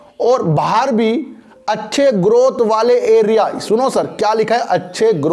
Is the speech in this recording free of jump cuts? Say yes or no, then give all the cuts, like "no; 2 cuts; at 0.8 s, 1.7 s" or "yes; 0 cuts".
yes; 0 cuts